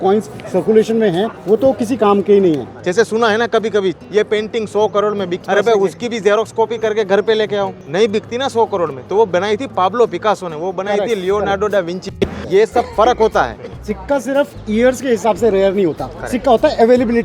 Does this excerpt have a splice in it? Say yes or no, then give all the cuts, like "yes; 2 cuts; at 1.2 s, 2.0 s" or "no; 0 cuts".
yes; 7 cuts; at 1.4 s, 2.7 s, 4.0 s, 5.4 s, 7.8 s, 12.4 s, 13.9 s